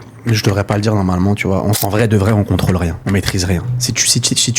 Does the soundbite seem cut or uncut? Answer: cut